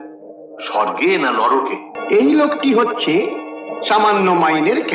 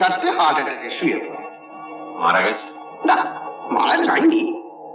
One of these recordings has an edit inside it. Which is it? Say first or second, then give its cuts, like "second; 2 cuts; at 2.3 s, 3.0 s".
first; 1 cut; at 1.9 s